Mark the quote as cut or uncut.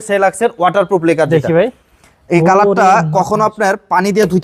uncut